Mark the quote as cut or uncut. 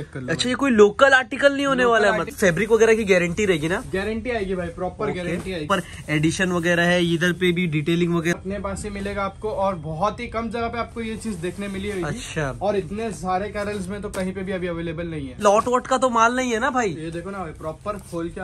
cut